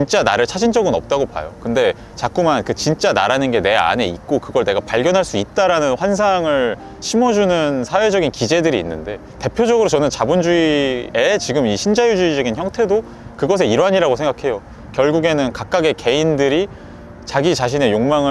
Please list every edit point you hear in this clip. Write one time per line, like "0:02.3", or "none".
0:11.0